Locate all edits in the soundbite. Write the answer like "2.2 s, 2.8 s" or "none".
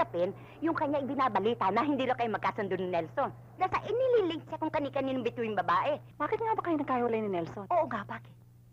6.1 s

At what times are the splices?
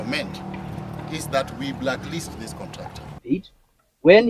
3.1 s

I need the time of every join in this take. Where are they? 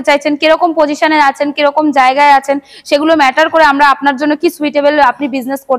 none

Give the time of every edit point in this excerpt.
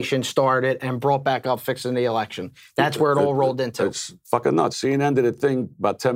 4.7 s

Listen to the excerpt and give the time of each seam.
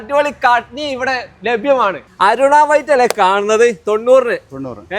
none

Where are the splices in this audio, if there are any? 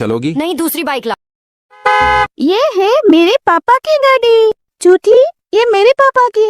1.1 s

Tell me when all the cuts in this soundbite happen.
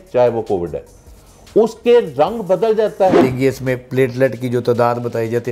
3.2 s

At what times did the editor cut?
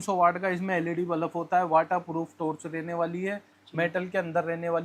none

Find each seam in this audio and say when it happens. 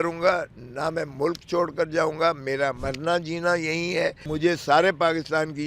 2.8 s, 4.2 s

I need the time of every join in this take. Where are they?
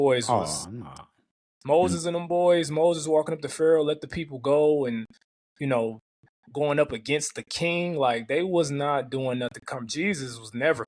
none

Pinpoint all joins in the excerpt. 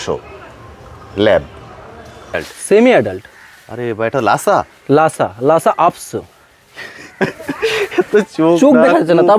2.4 s

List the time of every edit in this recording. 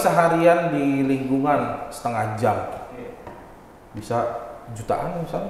none

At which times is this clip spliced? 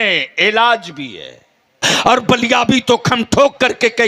1.9 s

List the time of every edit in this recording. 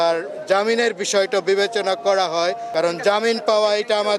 2.6 s

